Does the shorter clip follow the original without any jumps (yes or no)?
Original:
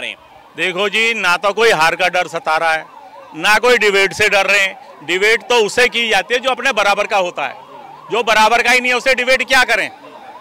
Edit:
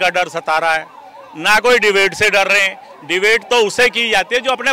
yes